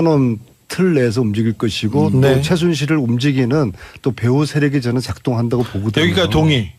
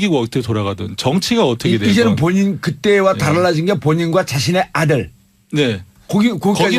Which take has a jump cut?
first; 1 cut; at 1.2 s

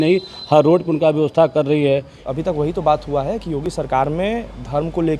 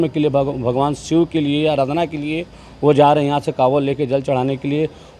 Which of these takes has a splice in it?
first; 1 cut; at 2.2 s

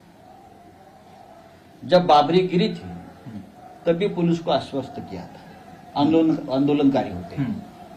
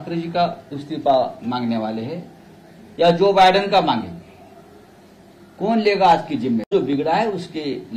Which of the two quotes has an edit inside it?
second; 1 cut; at 6.7 s

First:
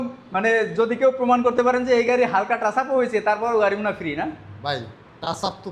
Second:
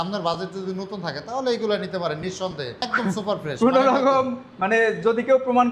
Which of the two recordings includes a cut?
second; 1 cut; at 2.9 s

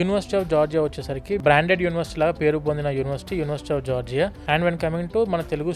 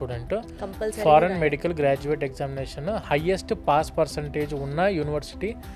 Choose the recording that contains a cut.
first; 2 cuts; at 1.4 s, 4.4 s

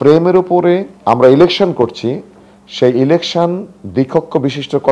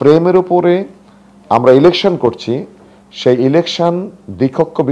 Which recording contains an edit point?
first; 1 cut; at 0.9 s

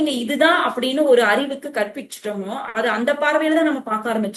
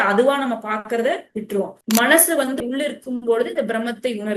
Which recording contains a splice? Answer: second; 1 cut; at 1.8 s

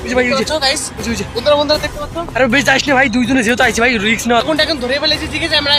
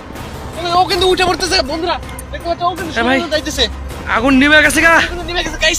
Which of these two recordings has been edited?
first; 1 cut; at 4.4 s

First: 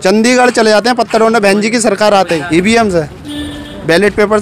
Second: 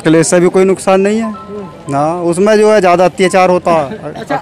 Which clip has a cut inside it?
first; 1 cut; at 2.4 s

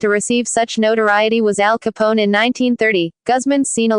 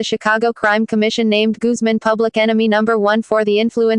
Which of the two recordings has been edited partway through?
first; 1 cut; at 3.1 s

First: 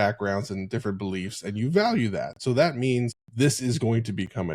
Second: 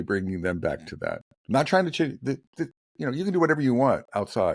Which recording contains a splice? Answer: first; 1 cut; at 3.2 s

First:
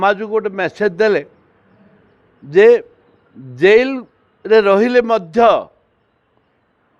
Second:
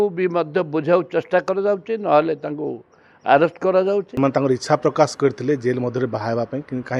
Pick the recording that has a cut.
second; 1 cut; at 4.1 s

